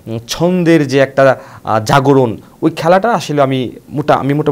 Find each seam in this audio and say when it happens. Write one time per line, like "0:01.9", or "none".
0:02.4